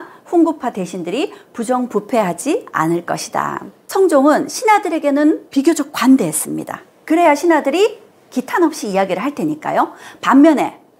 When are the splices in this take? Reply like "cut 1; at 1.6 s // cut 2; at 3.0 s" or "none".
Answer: cut 1; at 3.7 s